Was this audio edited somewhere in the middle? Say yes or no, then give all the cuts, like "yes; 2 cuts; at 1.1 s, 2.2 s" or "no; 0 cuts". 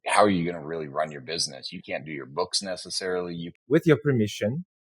yes; 1 cut; at 3.5 s